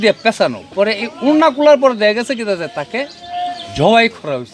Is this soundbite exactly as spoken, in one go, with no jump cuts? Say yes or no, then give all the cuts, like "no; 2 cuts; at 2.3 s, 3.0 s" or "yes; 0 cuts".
yes; 0 cuts